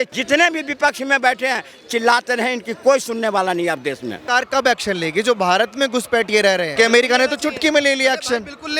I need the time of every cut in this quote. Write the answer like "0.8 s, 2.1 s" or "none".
4.2 s, 6.7 s